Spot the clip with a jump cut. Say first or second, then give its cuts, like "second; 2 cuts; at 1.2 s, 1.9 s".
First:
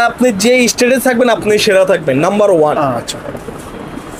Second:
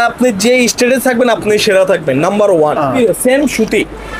second; 1 cut; at 3.0 s